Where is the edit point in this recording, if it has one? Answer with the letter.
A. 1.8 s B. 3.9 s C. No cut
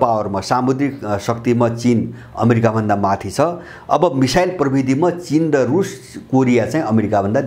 C